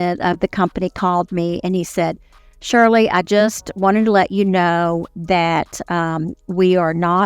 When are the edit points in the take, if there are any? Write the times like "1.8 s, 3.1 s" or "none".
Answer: none